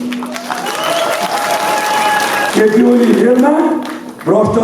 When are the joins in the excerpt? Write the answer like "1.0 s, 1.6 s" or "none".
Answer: 2.5 s